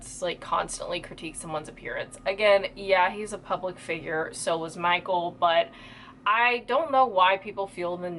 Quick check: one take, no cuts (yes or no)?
yes